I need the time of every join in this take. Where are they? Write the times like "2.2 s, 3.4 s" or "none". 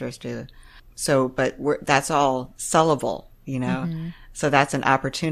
none